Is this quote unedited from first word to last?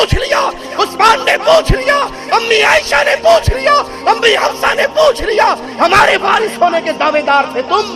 yes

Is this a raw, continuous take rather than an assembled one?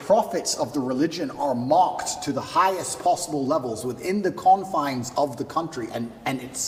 yes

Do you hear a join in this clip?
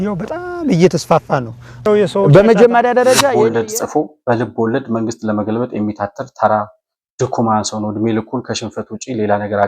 yes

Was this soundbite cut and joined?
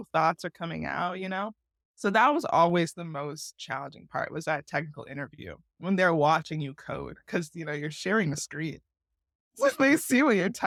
no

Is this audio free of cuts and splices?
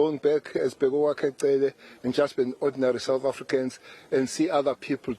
yes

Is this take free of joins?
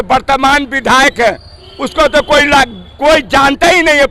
yes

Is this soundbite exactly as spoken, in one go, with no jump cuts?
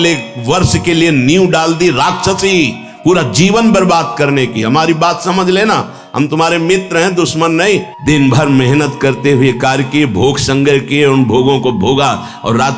no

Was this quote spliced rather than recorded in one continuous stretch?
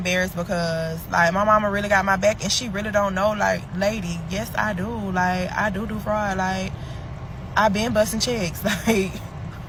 no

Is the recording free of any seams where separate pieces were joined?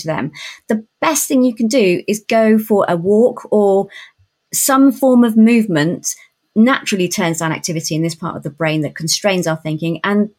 no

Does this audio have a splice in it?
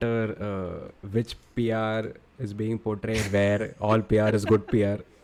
no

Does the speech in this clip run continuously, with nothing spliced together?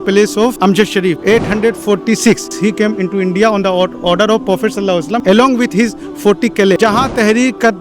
no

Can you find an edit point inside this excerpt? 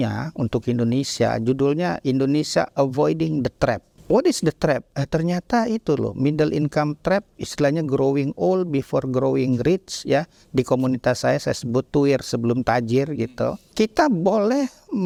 no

